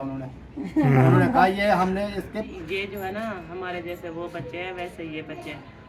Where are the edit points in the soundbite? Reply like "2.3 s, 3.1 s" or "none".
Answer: 2.5 s